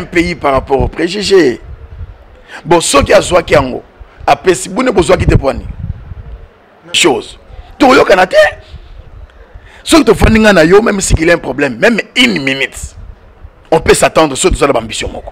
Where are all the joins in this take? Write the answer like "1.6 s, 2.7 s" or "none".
7.0 s